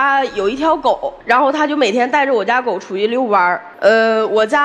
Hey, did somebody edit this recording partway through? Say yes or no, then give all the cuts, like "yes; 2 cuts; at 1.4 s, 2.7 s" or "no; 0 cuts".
yes; 2 cuts; at 1.1 s, 3.7 s